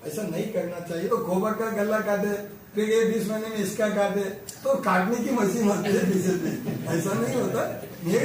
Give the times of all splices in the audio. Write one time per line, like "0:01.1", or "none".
0:01.1